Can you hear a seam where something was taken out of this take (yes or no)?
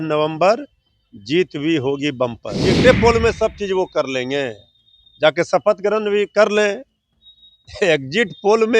yes